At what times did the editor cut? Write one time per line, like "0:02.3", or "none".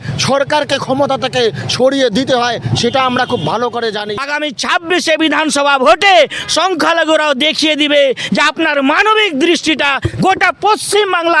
0:04.2